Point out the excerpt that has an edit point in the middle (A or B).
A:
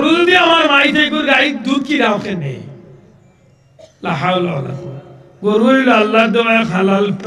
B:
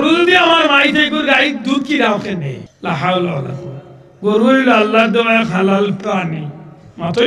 B